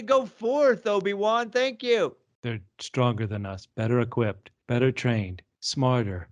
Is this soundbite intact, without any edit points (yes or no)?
no